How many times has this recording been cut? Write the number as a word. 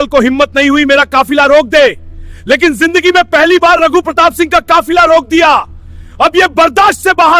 zero